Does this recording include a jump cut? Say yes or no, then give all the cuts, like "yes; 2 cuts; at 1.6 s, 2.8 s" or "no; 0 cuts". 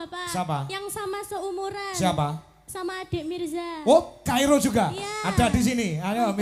no; 0 cuts